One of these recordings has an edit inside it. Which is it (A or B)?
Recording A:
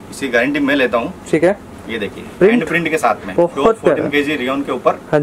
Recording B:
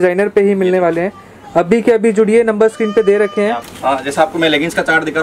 B